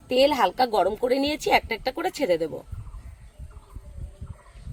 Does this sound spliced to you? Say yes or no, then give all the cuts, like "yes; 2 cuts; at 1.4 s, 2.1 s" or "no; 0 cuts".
no; 0 cuts